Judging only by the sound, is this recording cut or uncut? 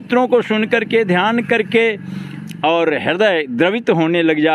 uncut